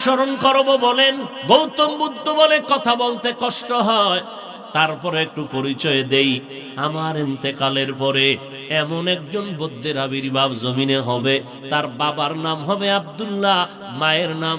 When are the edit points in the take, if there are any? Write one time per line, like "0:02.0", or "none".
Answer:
0:01.3
0:11.6